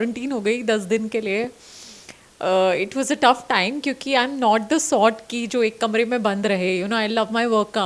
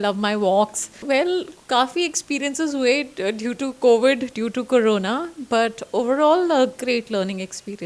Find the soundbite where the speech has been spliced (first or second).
second